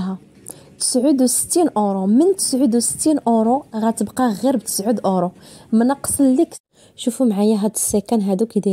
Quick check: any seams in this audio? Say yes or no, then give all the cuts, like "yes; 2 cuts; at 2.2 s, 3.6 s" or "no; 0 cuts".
yes; 1 cut; at 6.6 s